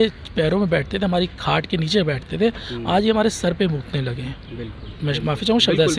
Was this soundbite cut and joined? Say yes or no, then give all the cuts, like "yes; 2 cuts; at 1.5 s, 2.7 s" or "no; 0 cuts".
no; 0 cuts